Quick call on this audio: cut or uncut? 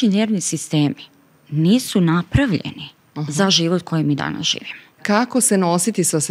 cut